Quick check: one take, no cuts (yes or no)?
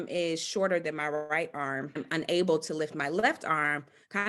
no